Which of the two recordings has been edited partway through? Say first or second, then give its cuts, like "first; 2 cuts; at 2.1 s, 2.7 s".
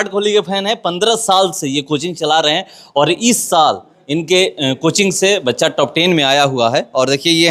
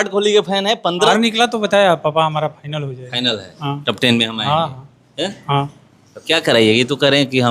second; 1 cut; at 1.1 s